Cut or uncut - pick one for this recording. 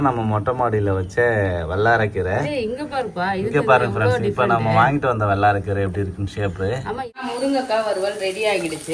cut